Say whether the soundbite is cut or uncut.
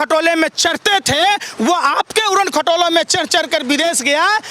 uncut